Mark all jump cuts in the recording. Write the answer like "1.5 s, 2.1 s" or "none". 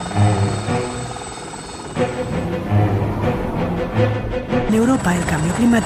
none